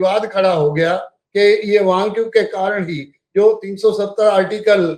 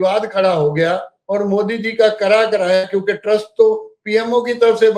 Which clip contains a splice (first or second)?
first